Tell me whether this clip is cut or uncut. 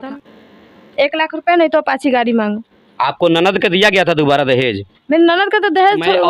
uncut